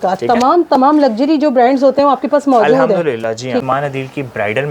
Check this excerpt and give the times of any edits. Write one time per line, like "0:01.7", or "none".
0:03.6